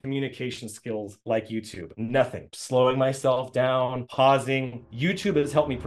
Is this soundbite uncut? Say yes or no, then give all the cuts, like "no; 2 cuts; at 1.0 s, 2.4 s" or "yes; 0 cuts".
no; 1 cut; at 4.7 s